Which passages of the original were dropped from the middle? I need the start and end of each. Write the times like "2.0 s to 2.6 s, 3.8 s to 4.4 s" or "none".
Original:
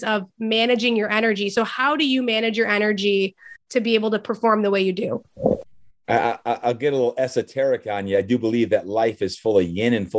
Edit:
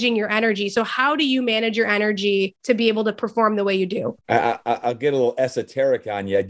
3.4 s to 3.6 s, 5.2 s to 6.0 s